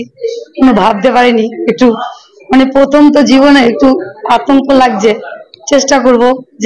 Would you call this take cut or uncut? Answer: uncut